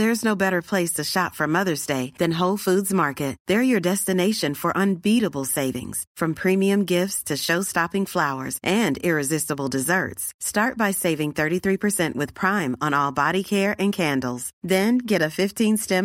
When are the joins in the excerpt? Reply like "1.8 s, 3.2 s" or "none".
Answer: none